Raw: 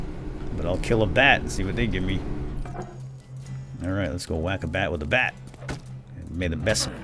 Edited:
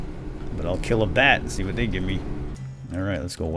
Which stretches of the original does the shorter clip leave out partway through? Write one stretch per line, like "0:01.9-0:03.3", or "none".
0:02.6-0:03.5

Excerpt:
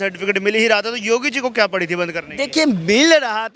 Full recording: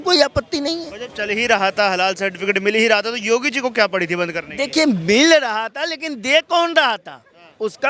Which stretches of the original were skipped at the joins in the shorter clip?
none

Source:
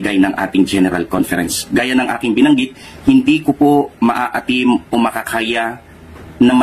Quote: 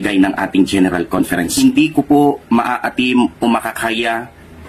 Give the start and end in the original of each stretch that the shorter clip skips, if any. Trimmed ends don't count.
0:01.5-0:03.0

